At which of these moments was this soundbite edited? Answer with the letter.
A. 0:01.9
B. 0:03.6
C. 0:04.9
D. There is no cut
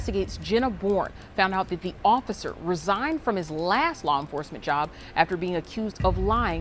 D